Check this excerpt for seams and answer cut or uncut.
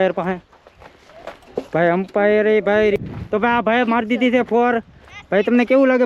cut